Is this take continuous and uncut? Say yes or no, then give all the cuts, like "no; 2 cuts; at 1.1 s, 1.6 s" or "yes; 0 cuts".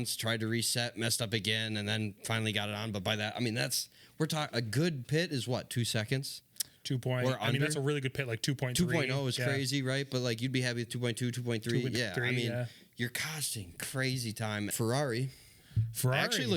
no; 1 cut; at 14.7 s